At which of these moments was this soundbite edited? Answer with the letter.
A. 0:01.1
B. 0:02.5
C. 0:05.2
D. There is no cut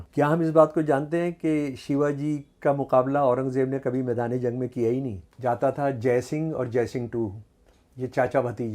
C